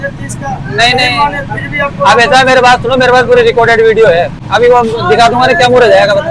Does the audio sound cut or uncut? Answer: cut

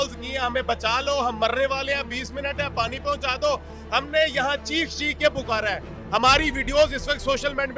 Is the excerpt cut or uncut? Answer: uncut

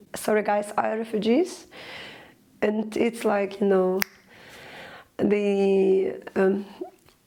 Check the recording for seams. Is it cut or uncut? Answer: uncut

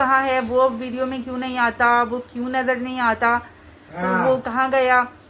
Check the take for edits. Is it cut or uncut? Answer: uncut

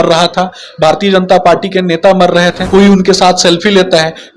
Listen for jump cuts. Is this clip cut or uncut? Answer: cut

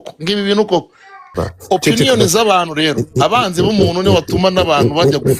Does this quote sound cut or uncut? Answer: cut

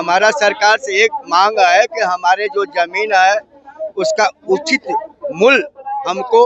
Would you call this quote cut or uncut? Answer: uncut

